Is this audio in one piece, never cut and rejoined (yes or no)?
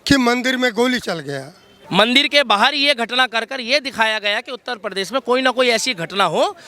no